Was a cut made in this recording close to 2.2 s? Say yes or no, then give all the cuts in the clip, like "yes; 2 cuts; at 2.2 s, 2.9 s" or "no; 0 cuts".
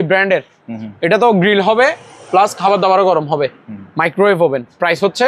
no; 0 cuts